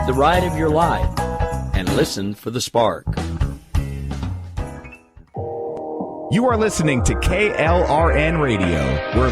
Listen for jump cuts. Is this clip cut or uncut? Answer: uncut